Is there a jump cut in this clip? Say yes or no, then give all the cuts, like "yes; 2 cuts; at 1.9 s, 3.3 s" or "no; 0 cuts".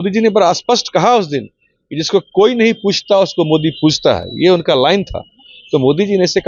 no; 0 cuts